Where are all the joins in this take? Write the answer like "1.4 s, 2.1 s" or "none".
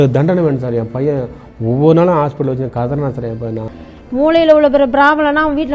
3.7 s